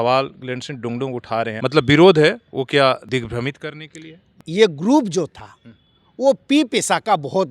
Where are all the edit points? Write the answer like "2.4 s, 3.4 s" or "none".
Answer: 1.6 s, 4.3 s